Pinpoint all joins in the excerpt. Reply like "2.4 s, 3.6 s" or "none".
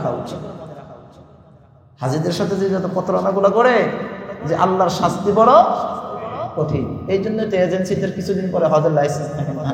none